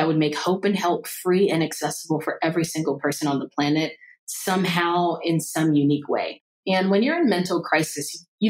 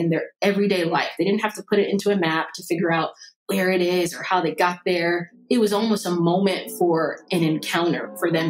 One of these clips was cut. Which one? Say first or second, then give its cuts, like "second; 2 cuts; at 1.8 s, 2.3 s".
first; 1 cut; at 6.3 s